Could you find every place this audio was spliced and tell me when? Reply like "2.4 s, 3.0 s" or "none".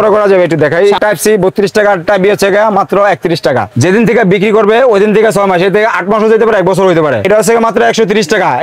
1.0 s, 3.7 s, 7.3 s